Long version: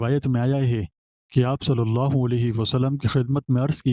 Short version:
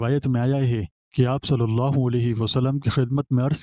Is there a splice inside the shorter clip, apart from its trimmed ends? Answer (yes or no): yes